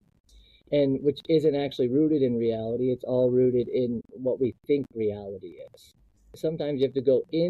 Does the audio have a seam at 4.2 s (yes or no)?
no